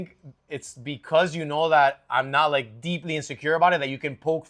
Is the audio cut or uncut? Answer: uncut